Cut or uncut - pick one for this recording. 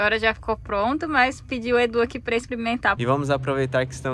cut